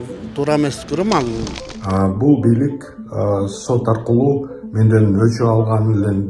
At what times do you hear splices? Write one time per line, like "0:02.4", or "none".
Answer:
0:01.5